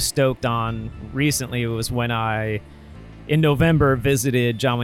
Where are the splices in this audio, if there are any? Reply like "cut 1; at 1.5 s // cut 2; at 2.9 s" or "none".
none